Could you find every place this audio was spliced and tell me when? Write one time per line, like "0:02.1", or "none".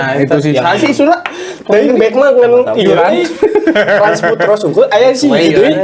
none